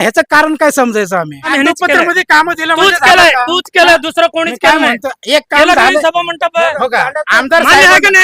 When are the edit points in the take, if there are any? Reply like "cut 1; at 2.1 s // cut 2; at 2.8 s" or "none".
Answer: cut 1; at 1.5 s